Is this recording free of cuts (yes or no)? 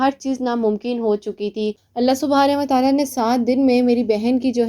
no